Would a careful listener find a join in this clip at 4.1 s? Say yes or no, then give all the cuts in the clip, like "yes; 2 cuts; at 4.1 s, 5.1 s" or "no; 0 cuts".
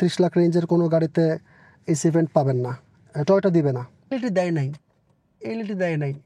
yes; 1 cut; at 4.1 s